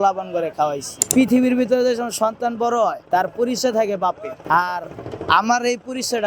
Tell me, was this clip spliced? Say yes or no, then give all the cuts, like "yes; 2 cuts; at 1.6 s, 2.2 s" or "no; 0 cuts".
yes; 3 cuts; at 0.9 s, 3.0 s, 4.3 s